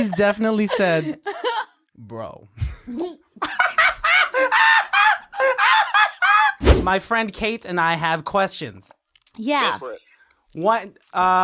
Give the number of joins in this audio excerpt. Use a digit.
1